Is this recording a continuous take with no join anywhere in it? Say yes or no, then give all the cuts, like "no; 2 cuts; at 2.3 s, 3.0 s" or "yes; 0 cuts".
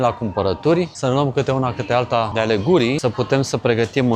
no; 3 cuts; at 0.9 s, 2.3 s, 3.0 s